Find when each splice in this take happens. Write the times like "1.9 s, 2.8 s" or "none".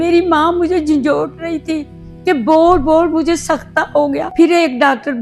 4.3 s